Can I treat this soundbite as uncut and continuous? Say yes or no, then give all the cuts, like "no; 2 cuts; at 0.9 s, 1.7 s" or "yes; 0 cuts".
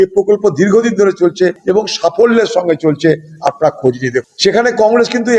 no; 1 cut; at 1.6 s